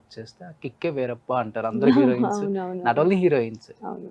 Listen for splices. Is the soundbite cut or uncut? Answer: uncut